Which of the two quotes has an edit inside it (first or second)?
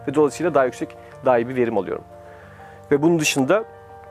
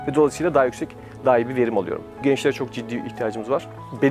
second